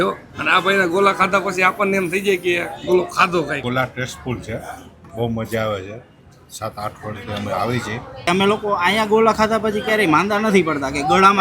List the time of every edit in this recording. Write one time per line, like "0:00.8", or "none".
0:03.6
0:08.2